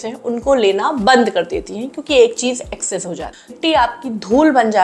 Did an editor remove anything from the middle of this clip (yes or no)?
yes